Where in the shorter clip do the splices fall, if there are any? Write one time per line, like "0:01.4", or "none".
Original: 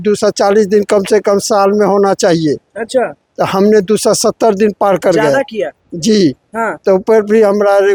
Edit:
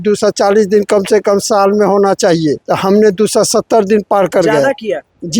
0:02.6

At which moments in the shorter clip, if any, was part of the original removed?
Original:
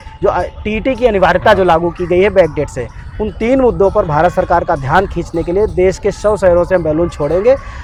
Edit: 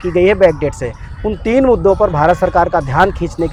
none

